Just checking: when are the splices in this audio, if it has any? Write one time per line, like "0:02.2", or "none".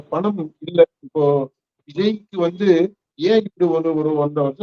none